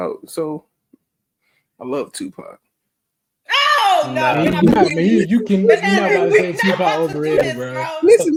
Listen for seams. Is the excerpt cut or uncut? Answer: uncut